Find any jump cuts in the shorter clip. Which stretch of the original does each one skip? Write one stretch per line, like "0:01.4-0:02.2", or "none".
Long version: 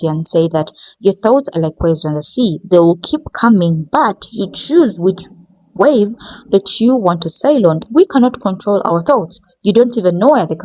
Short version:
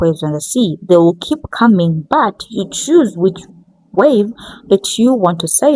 none

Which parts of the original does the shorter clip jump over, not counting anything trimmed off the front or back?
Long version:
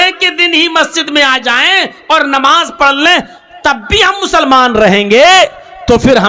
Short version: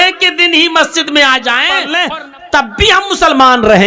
0:01.9-0:03.0

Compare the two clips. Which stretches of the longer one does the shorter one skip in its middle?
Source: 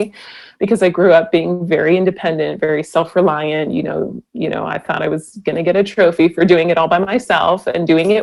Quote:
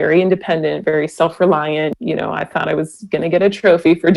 0:03.7-0:04.3

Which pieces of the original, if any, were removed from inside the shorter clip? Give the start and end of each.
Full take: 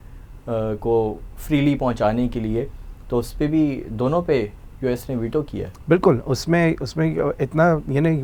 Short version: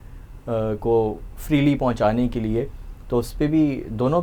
none

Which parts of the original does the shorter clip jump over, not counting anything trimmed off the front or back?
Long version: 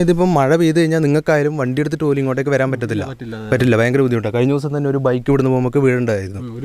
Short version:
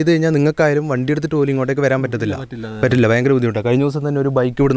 none

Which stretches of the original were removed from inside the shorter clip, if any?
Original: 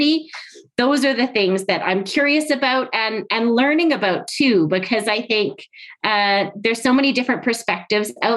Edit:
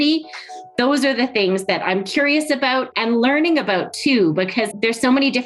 0:02.9-0:03.3
0:05.0-0:06.5

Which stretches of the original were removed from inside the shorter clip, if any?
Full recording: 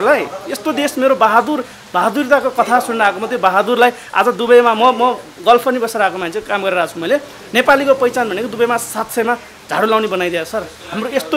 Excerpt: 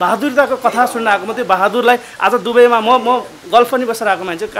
none

